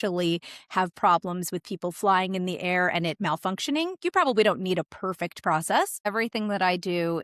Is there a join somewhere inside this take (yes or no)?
yes